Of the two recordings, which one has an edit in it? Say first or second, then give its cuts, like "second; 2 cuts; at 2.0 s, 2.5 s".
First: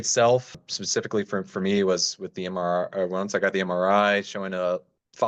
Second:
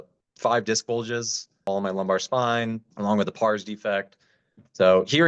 second; 2 cuts; at 1.7 s, 2.9 s